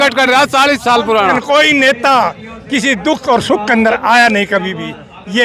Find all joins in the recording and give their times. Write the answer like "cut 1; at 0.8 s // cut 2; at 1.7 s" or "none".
cut 1; at 1.4 s